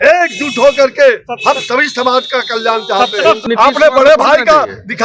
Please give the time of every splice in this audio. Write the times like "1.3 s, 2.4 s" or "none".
3.4 s

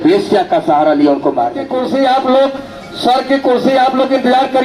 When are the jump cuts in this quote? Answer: 1.8 s

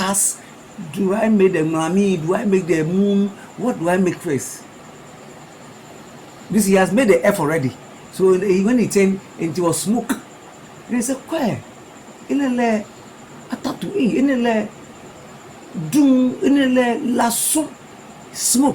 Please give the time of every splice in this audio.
none

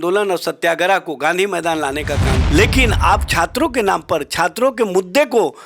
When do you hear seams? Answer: 2.3 s

